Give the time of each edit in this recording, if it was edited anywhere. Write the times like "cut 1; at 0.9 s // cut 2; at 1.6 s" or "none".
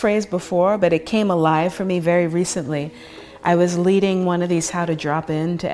none